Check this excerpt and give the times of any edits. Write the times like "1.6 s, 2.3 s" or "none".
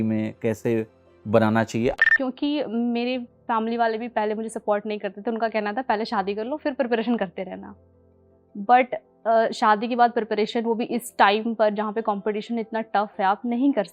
1.9 s